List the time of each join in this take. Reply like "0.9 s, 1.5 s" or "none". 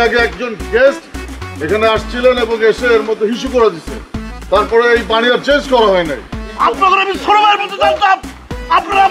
6.4 s